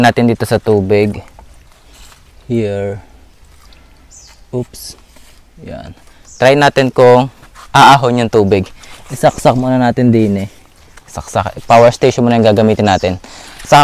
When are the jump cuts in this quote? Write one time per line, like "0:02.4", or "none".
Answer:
none